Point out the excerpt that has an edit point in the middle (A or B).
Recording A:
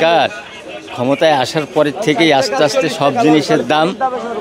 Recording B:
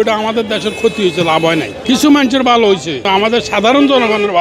B